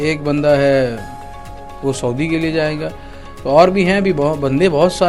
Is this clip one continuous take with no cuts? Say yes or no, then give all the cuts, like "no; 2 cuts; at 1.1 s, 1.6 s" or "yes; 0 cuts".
yes; 0 cuts